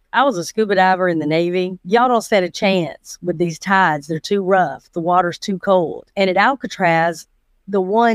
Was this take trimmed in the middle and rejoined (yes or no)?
yes